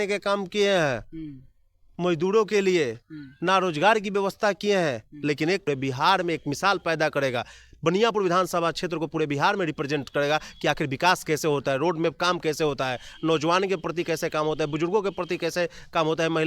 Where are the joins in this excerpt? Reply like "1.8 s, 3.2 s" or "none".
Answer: 5.6 s